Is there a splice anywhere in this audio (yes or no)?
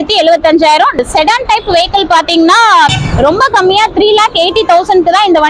yes